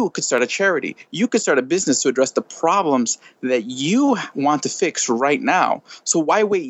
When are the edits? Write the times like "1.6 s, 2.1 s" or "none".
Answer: 4.3 s